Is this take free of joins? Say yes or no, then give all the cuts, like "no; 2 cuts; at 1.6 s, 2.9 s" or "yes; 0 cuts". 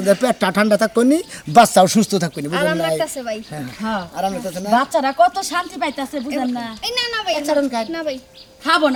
yes; 0 cuts